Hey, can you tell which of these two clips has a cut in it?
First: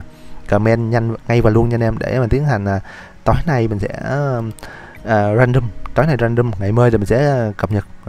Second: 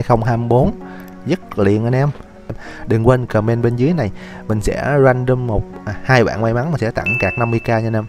second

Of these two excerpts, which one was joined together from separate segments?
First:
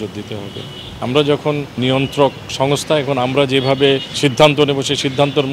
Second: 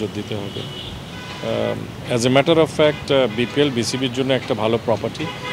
first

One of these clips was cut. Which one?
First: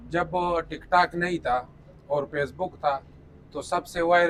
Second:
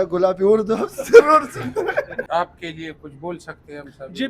second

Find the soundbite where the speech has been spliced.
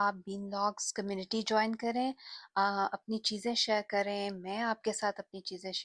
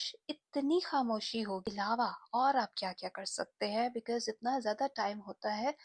second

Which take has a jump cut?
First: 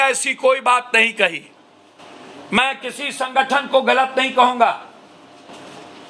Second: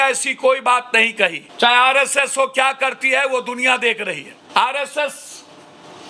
second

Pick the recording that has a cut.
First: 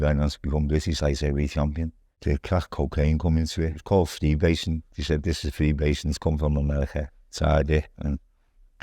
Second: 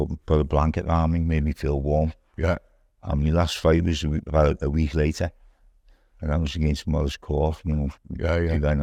first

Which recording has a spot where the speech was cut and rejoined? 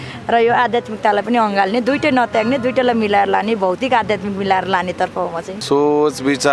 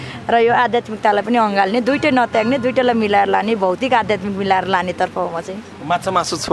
first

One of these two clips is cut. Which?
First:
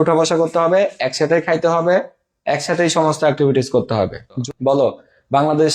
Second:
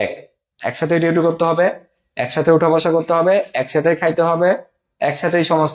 first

